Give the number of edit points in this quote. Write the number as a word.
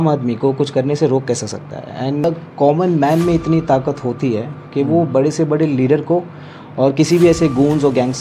one